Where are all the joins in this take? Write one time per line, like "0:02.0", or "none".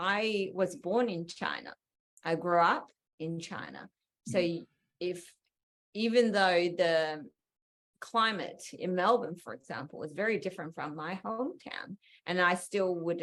none

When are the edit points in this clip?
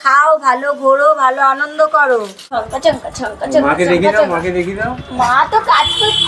0:02.6

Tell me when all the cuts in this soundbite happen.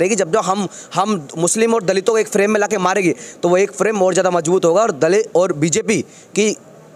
none

